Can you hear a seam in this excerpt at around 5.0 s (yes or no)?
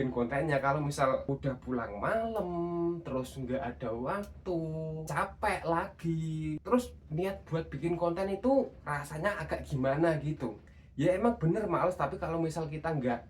yes